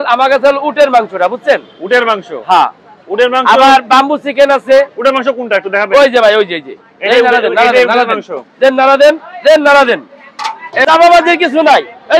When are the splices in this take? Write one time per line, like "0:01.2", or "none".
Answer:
0:10.8